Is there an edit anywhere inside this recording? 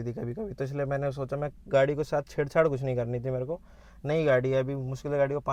no; 0 cuts

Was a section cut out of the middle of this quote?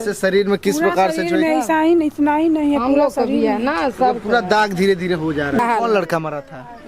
yes; 1 cut; at 5.6 s

